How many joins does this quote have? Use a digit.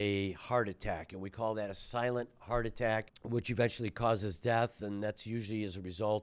1